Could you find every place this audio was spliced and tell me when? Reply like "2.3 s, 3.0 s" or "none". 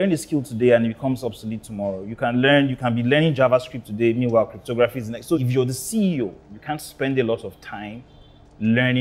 5.4 s